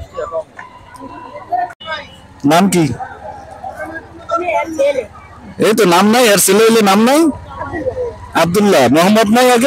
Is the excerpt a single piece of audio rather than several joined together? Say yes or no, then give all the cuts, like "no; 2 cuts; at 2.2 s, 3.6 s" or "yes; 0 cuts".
yes; 0 cuts